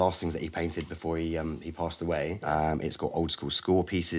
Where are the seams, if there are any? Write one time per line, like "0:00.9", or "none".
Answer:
0:02.4